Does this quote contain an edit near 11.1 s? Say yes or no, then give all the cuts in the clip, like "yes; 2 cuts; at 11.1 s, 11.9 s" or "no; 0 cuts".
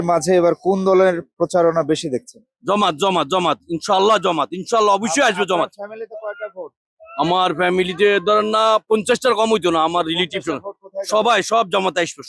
no; 0 cuts